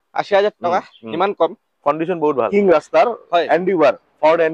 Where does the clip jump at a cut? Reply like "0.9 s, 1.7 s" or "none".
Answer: 2.5 s